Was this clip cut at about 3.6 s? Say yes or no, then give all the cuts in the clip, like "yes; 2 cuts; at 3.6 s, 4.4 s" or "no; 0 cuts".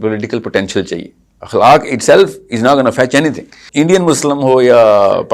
yes; 1 cut; at 3.6 s